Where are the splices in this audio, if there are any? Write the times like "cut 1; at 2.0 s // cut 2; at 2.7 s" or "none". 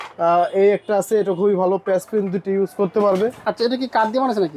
cut 1; at 3.4 s